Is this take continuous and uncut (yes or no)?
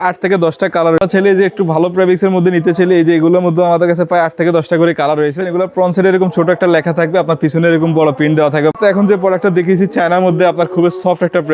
no